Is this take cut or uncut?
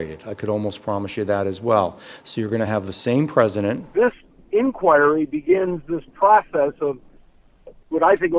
cut